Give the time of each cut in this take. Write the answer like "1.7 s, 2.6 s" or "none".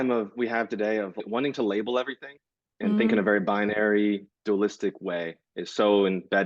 1.2 s